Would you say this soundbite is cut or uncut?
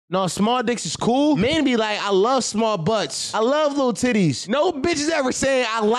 cut